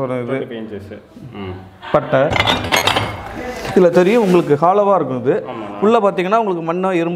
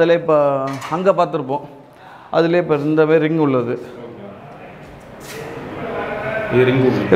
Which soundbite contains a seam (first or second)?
first